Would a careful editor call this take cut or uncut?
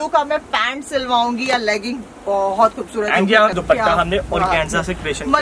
cut